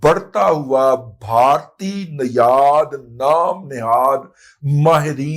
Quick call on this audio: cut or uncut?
uncut